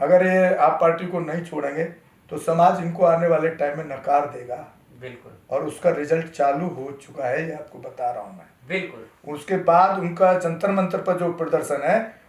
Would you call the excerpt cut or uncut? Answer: uncut